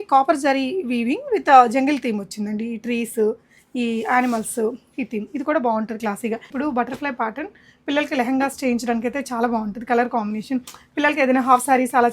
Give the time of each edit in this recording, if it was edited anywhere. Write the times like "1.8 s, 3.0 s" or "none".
6.5 s